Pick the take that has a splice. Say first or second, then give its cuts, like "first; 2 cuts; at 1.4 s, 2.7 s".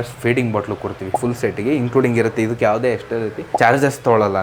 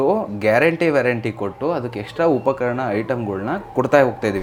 first; 2 cuts; at 1.2 s, 3.4 s